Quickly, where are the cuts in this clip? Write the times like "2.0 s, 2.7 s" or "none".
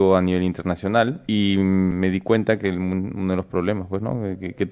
1.2 s, 1.9 s